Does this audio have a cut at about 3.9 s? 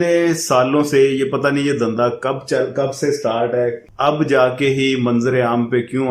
yes; 1 cut; at 3.9 s

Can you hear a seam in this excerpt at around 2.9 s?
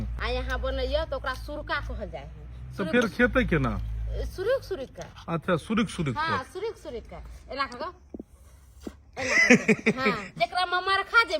no; 1 cut; at 10.4 s

